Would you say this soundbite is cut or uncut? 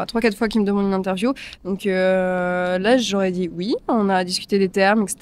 uncut